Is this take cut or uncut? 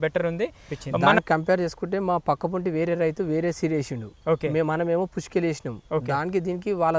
cut